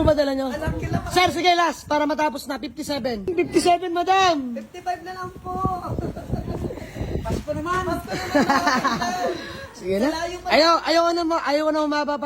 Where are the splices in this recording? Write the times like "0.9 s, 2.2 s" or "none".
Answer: 3.3 s